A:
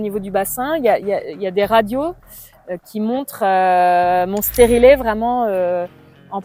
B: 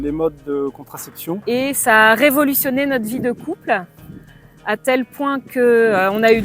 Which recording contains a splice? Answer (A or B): B